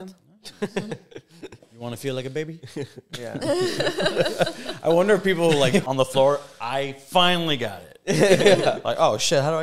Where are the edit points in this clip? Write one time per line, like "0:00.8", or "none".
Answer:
0:05.8